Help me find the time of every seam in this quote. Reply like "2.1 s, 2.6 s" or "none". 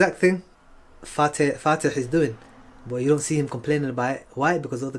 none

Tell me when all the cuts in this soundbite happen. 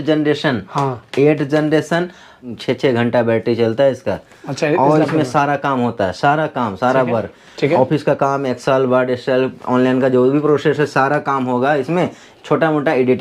2.6 s

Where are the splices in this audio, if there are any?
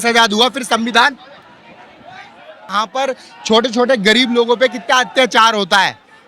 2.7 s

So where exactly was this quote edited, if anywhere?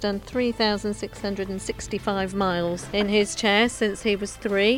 2.9 s

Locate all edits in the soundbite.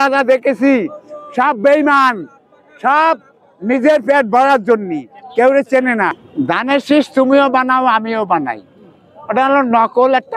6.2 s

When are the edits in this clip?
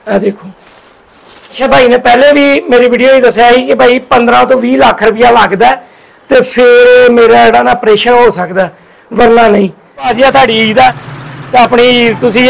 1.6 s, 10.1 s

